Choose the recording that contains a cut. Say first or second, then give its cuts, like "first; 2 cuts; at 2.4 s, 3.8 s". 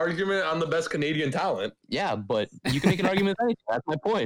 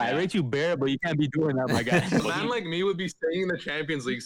second; 1 cut; at 2.2 s